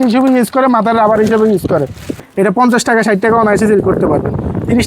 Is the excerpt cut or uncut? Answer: cut